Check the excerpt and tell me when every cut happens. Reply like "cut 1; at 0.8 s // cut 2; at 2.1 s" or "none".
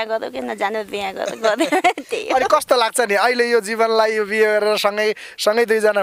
none